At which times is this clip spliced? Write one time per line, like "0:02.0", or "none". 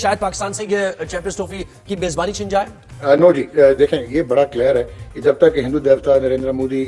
0:02.8